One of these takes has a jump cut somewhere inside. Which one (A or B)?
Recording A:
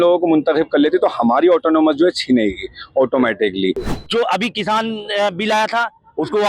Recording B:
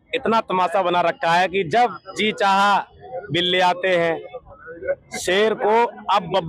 A